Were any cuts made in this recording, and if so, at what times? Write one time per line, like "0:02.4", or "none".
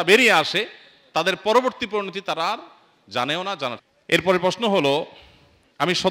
0:03.9